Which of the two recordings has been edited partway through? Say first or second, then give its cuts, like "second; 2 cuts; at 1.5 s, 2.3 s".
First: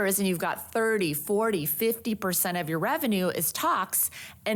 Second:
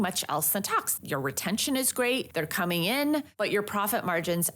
second; 3 cuts; at 0.9 s, 2.3 s, 3.3 s